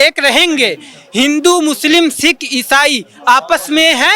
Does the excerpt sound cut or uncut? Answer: uncut